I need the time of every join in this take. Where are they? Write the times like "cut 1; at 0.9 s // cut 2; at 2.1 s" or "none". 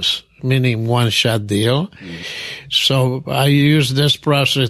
cut 1; at 1.9 s